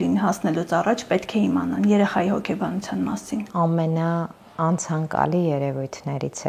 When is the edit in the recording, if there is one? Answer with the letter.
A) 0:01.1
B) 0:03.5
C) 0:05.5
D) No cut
B